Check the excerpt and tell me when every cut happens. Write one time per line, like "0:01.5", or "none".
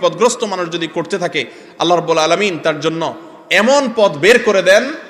none